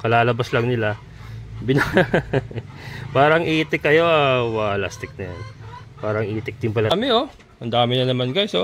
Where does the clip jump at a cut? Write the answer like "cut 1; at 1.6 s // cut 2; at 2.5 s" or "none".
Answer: cut 1; at 6.9 s